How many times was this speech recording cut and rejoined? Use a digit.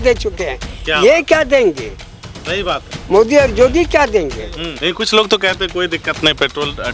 1